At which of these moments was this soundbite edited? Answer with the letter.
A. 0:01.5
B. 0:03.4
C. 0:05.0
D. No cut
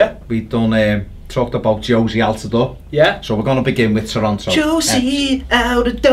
C